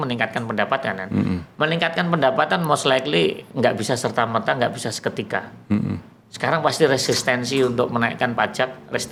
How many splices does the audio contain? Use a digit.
0